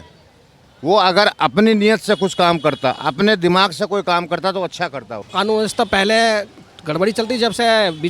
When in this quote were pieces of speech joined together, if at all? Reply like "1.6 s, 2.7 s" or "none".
5.2 s